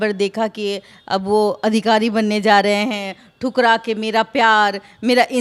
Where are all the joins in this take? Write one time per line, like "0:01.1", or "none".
none